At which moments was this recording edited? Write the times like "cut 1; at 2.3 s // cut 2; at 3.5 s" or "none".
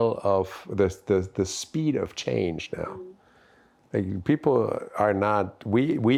none